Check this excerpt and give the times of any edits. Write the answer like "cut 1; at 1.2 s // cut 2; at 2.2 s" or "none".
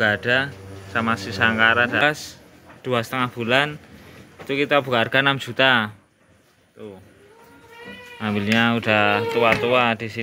cut 1; at 2.0 s